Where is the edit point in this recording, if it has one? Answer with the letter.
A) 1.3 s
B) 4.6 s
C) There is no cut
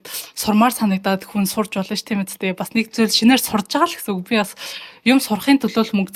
C